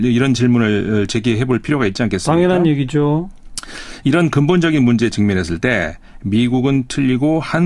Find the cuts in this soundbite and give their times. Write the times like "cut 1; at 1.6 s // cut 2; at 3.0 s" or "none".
cut 1; at 1.7 s